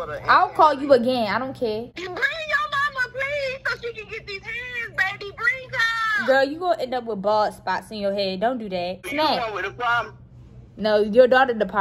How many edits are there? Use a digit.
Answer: 2